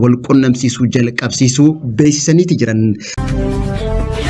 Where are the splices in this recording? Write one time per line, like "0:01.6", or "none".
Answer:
0:03.1